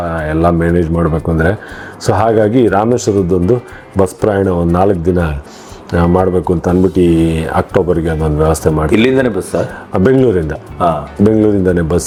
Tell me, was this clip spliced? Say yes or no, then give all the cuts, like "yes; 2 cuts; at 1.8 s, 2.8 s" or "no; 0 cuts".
no; 0 cuts